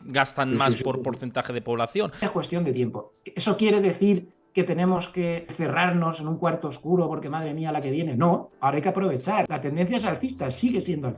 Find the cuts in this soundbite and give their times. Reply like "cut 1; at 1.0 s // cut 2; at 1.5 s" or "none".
cut 1; at 2.2 s // cut 2; at 5.5 s // cut 3; at 9.5 s